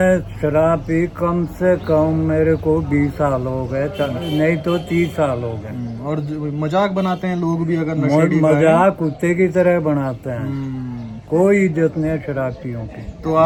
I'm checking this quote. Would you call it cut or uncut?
uncut